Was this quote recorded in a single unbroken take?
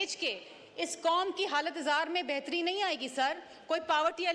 yes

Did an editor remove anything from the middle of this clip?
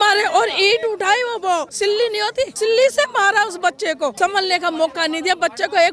yes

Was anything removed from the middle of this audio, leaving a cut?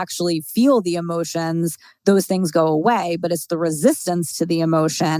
no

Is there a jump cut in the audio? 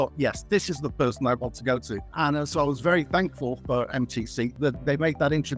no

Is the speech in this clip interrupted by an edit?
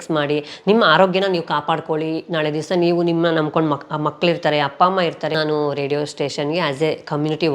yes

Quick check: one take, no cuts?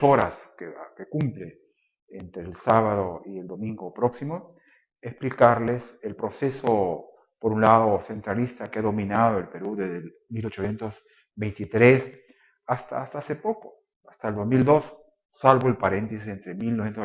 no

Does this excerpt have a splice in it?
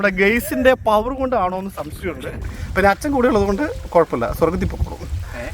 yes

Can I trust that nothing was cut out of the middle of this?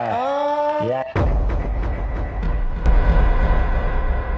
yes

